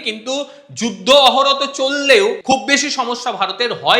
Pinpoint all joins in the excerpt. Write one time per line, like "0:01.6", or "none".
0:02.4